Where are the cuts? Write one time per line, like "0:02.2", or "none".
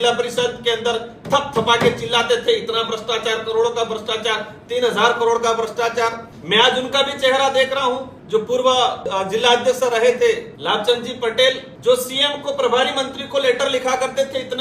0:06.3
0:08.1
0:09.0
0:10.5
0:11.9